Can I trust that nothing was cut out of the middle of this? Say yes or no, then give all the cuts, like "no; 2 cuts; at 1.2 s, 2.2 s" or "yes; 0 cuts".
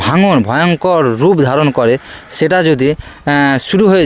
yes; 0 cuts